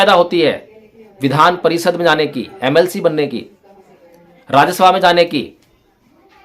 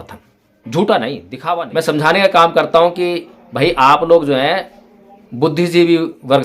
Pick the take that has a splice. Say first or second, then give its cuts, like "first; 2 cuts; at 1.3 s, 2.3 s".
second; 1 cut; at 1.3 s